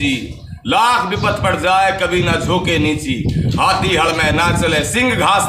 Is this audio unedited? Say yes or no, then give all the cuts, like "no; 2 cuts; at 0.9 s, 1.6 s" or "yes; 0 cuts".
yes; 0 cuts